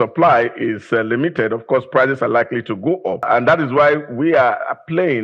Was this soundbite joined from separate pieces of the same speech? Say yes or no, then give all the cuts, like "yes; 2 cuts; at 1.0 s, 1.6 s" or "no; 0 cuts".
yes; 1 cut; at 3.3 s